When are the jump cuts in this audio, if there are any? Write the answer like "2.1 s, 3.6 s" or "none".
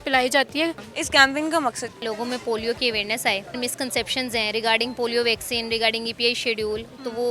0.9 s, 2.0 s, 3.6 s